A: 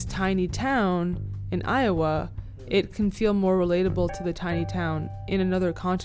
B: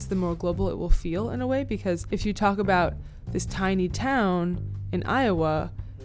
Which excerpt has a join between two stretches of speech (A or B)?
B